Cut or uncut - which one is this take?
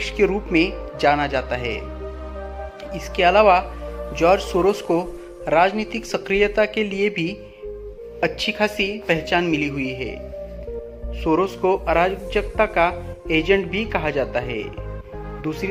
uncut